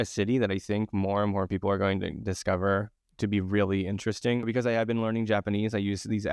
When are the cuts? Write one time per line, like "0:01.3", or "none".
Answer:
0:03.0
0:04.5